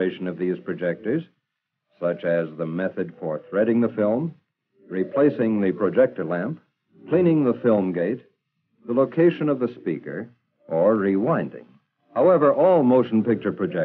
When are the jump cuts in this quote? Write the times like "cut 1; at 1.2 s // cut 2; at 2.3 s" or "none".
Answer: cut 1; at 11.1 s